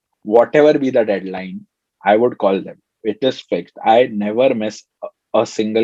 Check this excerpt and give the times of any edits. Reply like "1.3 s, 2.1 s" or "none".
none